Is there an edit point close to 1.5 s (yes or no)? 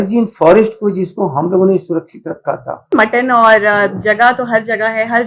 no